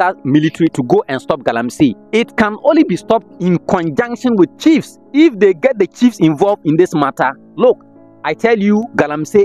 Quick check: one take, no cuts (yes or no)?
no